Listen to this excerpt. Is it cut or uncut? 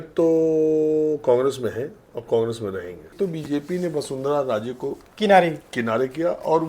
cut